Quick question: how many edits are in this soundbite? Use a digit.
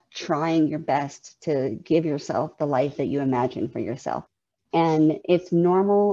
1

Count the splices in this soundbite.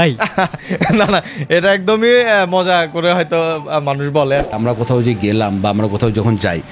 1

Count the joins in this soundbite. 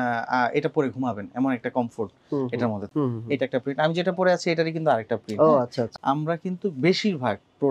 2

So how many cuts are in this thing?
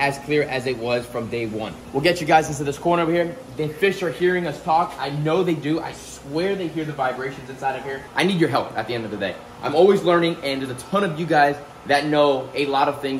2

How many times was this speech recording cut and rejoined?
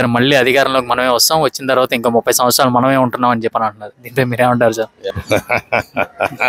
1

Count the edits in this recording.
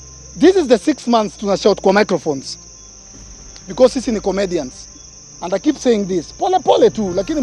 0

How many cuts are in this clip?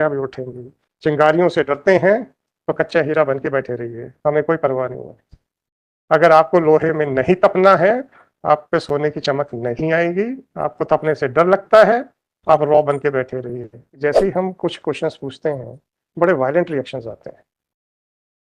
1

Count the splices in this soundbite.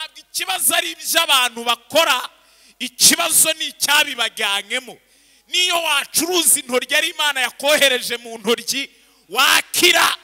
0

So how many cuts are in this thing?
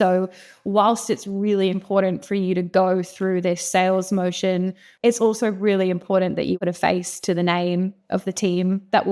2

